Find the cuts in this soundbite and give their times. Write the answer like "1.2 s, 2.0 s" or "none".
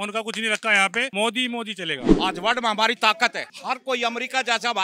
1.1 s, 2.1 s, 3.5 s